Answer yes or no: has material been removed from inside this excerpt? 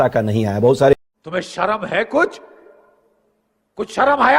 yes